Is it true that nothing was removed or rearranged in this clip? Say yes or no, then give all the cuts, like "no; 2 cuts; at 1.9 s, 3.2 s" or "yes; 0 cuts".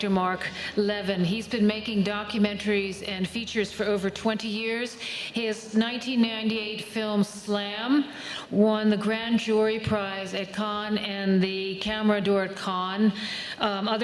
no; 1 cut; at 6.0 s